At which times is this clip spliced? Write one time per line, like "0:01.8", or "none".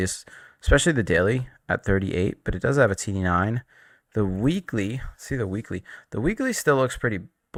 none

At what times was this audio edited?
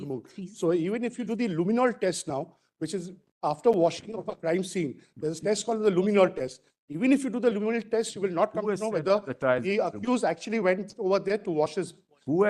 none

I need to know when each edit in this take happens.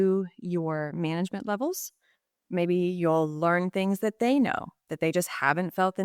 none

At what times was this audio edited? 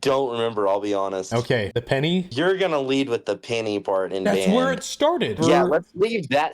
0:02.3
0:05.4

